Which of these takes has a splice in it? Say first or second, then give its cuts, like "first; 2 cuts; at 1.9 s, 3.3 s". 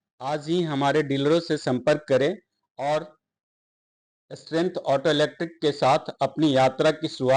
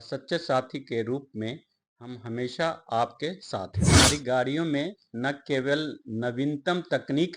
second; 1 cut; at 4.0 s